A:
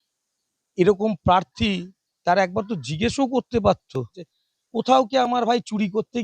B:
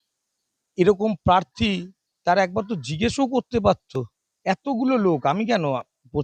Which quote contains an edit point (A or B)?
A